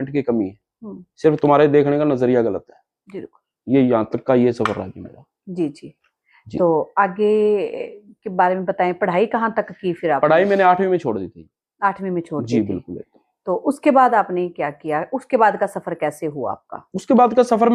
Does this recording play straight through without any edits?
yes; 0 cuts

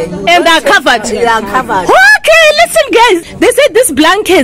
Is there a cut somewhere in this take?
no; 0 cuts

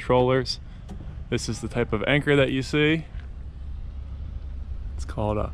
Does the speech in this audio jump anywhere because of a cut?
no; 0 cuts

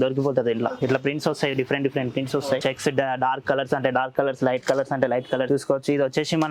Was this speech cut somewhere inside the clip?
yes; 2 cuts; at 0.8 s, 5.5 s

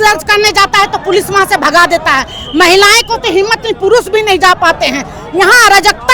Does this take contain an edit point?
no; 0 cuts

